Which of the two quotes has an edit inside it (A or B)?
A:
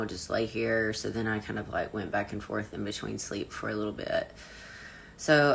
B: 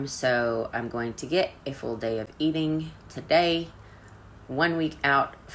B